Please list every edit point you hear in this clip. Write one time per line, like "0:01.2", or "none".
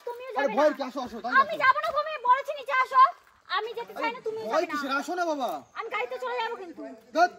none